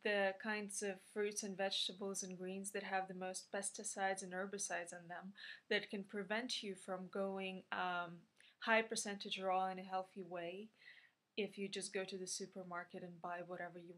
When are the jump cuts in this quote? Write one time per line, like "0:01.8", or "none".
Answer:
none